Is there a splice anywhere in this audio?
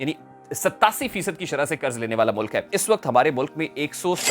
yes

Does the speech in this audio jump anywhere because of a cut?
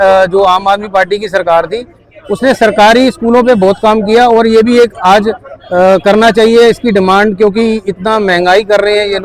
no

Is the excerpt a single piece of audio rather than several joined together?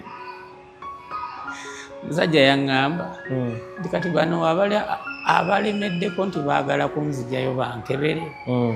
yes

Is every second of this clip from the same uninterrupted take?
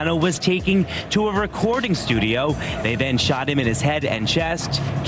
yes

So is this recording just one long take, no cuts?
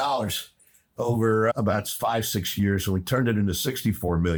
yes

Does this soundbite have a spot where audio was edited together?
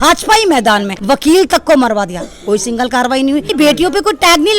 yes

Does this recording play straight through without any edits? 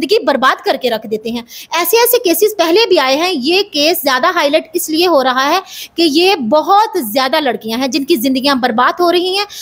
yes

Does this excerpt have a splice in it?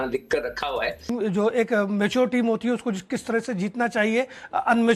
yes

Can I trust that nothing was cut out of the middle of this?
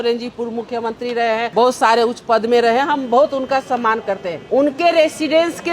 no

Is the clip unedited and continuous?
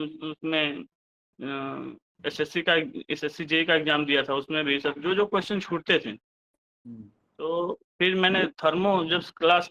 yes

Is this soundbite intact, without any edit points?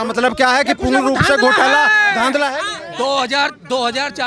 yes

